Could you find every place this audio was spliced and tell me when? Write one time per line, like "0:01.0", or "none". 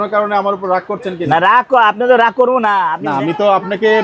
0:03.0

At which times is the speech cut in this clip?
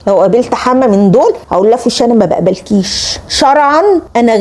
0:03.2

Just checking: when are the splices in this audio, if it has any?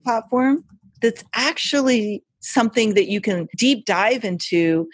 0:03.5

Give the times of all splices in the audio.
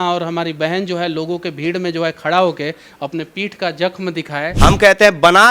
0:04.4

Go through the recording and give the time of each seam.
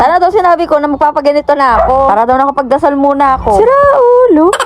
none

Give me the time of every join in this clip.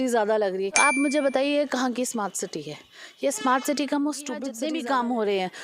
0:00.8
0:04.5

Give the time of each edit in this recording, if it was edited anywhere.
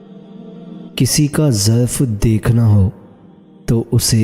0:00.9

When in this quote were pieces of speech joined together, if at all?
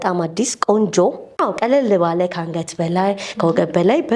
0:01.4

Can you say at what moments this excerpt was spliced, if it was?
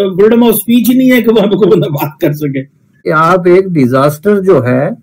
0:03.0

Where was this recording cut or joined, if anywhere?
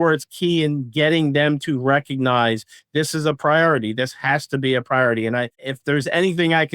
0:05.6

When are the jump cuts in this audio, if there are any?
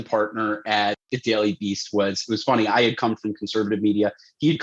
0:01.0

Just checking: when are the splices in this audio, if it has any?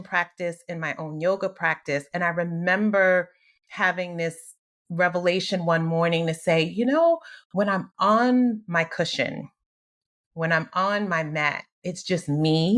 none

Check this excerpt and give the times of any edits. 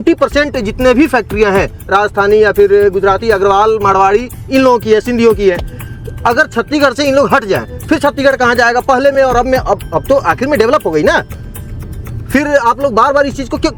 none

